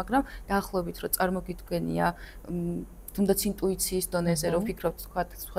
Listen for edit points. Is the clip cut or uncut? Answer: uncut